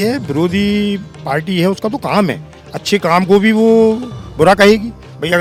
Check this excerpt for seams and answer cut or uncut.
uncut